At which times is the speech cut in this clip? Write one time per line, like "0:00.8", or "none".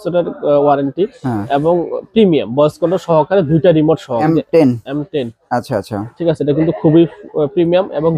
0:04.2